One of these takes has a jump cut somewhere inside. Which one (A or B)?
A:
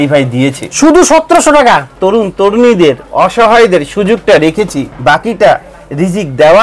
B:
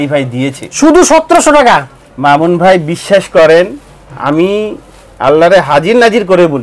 A